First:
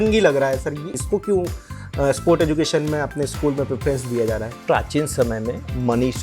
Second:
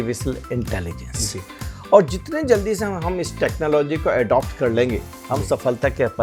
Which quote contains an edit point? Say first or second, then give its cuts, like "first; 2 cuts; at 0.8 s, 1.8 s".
first; 2 cuts; at 1.0 s, 4.6 s